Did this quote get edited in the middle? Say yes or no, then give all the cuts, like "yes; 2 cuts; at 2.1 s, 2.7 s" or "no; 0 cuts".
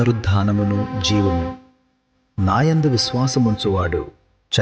no; 0 cuts